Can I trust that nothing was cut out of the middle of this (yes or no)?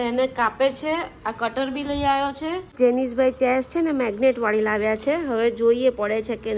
no